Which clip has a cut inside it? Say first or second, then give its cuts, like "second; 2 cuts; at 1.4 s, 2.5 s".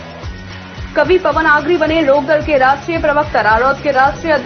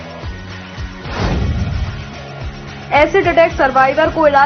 second; 1 cut; at 0.9 s